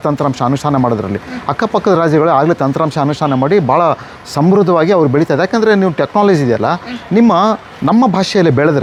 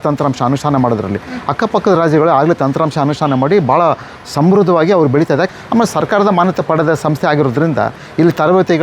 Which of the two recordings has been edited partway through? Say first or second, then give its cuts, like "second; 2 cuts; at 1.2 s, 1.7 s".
second; 1 cut; at 5.5 s